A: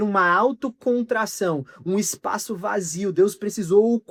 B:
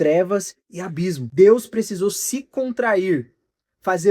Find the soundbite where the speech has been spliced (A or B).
B